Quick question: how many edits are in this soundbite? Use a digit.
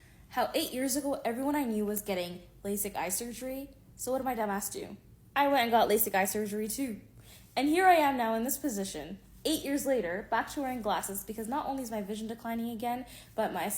0